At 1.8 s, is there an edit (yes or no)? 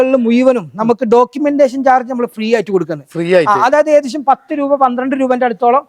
no